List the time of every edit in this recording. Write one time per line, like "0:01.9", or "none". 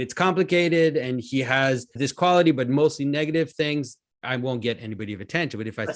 0:01.9